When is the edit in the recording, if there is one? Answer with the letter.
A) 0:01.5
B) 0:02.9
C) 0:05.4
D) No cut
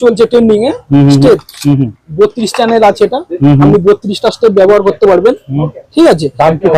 D